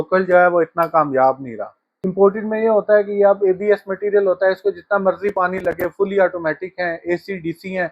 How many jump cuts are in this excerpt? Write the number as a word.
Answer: one